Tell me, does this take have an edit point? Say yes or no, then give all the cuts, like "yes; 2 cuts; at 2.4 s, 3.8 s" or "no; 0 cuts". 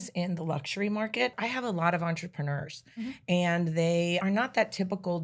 yes; 2 cuts; at 1.3 s, 4.2 s